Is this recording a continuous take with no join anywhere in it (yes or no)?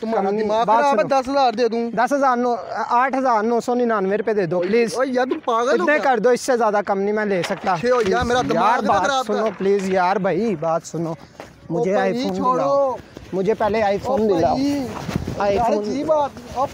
yes